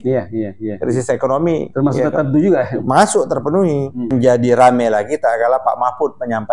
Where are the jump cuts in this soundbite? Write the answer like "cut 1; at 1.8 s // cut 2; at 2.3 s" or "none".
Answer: cut 1; at 4.1 s